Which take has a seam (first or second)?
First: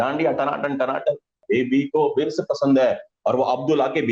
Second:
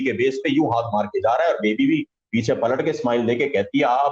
first